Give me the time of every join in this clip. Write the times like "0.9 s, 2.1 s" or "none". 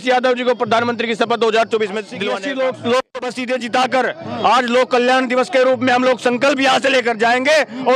2.3 s

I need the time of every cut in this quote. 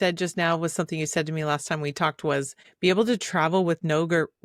2.6 s

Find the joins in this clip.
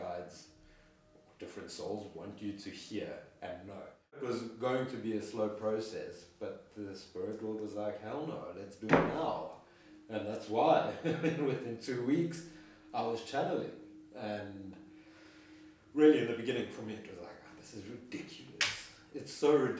4.2 s

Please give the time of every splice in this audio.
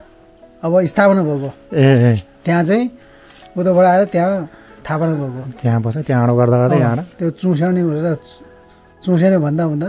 none

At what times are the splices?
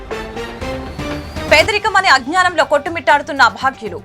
1.5 s

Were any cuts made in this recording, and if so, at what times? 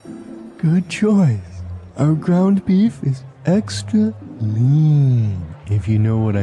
none

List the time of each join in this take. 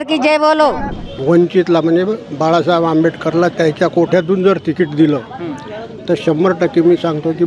0.9 s

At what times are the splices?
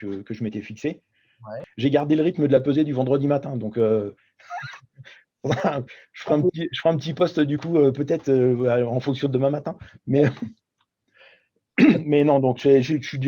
1.6 s

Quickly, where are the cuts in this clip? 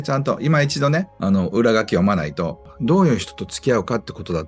1.1 s, 2.7 s

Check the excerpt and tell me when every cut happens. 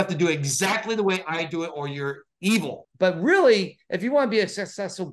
2.8 s

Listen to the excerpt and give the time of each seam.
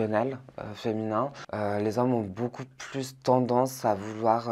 1.4 s

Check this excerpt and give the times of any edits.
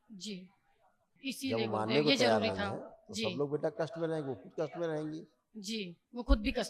1.1 s

